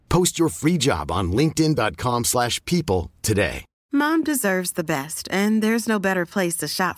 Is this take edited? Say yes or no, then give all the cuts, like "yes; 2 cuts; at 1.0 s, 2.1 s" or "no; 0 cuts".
yes; 1 cut; at 3.7 s